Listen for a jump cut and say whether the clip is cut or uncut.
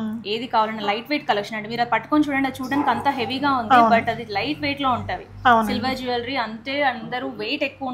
uncut